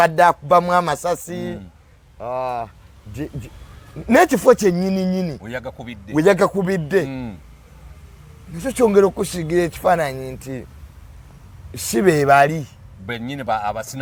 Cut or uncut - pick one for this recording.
uncut